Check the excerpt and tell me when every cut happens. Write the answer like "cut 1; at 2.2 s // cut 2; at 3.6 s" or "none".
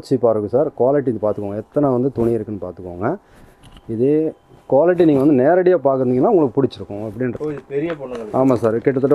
cut 1; at 7.3 s